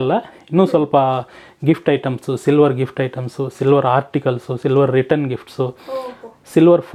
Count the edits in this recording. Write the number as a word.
zero